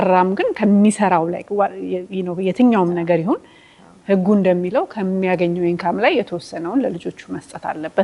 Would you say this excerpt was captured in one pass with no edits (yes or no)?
yes